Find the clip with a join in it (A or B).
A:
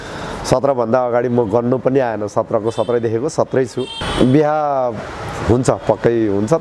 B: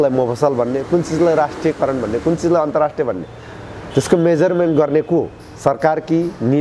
A